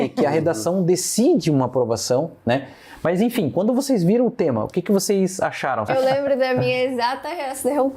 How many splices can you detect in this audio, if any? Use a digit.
1